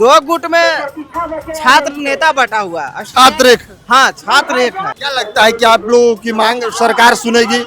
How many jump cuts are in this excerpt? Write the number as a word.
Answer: one